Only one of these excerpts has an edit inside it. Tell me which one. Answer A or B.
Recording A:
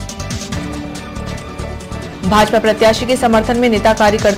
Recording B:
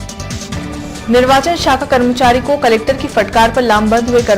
B